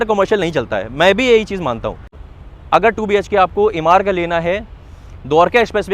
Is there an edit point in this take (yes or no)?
yes